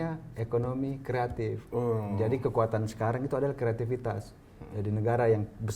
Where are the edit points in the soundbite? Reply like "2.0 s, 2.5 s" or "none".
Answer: none